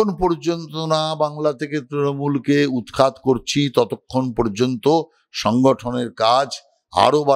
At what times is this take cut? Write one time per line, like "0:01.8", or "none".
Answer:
none